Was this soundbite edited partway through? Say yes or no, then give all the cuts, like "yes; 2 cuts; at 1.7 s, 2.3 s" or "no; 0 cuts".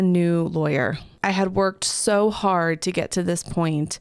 yes; 1 cut; at 1.1 s